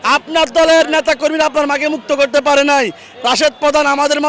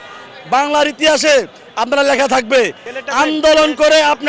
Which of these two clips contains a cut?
second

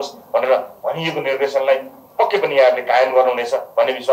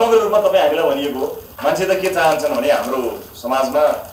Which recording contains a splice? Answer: second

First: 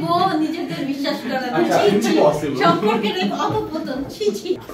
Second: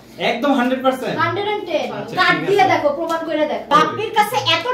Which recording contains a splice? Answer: second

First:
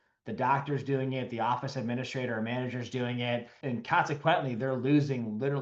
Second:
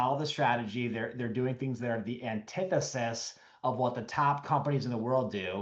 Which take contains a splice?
first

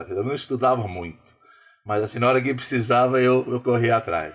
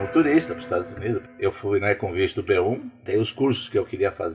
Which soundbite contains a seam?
second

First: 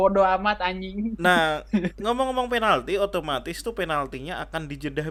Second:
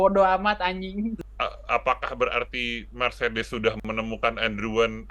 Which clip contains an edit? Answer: second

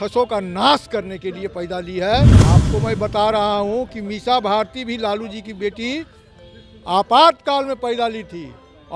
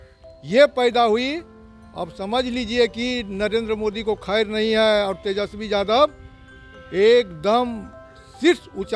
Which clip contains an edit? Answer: first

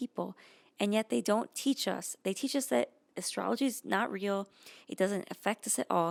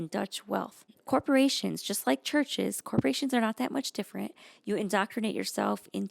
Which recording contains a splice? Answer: second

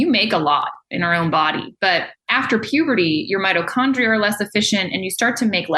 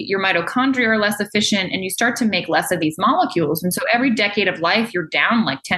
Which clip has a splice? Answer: first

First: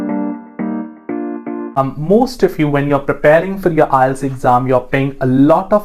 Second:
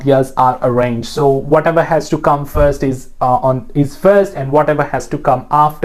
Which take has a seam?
first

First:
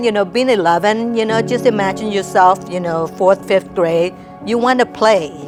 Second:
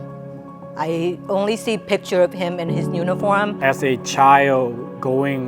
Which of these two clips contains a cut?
second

